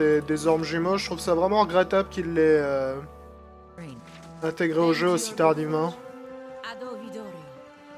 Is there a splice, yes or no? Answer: yes